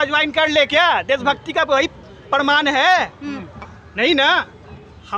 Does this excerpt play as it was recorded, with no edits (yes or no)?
yes